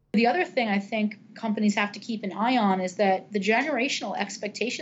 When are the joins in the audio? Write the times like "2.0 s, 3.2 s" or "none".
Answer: none

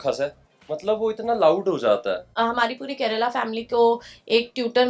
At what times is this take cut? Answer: 2.3 s

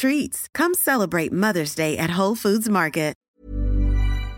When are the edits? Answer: 3.2 s

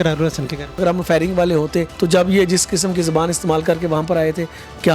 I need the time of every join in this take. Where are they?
0.8 s, 1.9 s

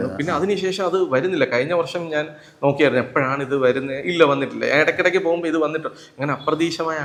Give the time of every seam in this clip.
none

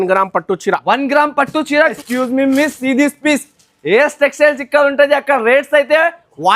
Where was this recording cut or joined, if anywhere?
2.0 s

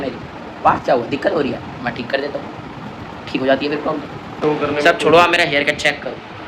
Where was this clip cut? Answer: 4.3 s

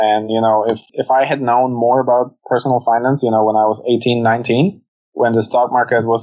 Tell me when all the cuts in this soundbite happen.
0.9 s

